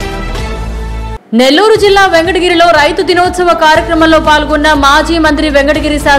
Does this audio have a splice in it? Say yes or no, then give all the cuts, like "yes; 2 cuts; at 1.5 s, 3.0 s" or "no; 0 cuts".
yes; 1 cut; at 1.2 s